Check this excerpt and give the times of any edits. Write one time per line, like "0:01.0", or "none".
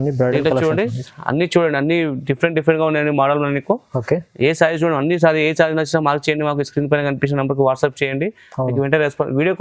none